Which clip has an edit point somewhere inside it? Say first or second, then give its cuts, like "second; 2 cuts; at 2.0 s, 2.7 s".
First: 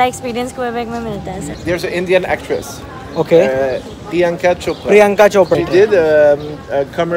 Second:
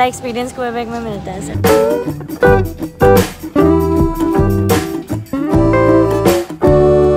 first; 2 cuts; at 1.5 s, 5.6 s